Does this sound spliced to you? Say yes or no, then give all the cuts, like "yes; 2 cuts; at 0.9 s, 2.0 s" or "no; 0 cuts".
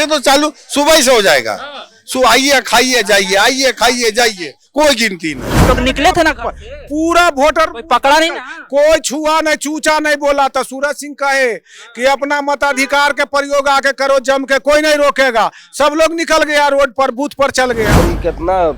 yes; 2 cuts; at 5.6 s, 17.9 s